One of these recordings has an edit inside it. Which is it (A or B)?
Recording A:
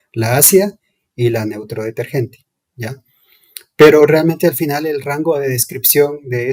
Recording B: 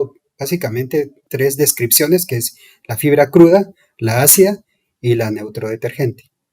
B